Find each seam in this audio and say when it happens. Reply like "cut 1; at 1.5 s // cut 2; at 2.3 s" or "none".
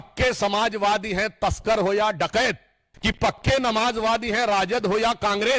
cut 1; at 2.8 s